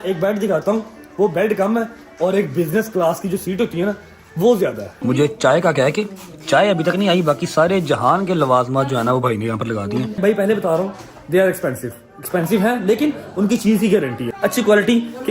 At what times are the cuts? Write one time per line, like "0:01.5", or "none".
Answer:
0:04.9
0:10.2
0:14.2